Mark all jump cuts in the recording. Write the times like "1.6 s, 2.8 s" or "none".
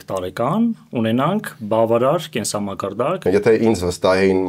3.2 s